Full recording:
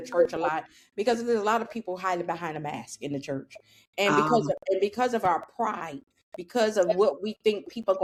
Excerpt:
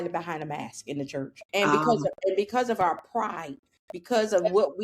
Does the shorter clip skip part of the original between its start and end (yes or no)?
yes